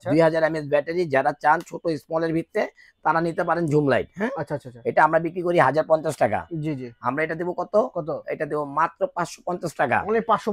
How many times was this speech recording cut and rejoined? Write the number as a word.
zero